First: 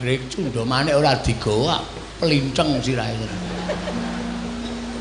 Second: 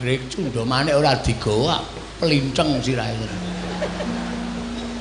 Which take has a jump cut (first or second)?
first